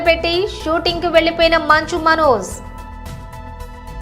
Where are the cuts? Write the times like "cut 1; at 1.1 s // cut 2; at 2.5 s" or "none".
none